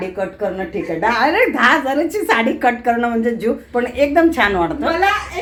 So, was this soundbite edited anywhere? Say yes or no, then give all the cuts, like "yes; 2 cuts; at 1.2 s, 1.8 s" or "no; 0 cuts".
no; 0 cuts